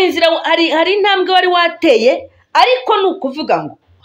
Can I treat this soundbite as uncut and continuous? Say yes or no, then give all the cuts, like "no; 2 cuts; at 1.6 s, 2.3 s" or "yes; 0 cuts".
yes; 0 cuts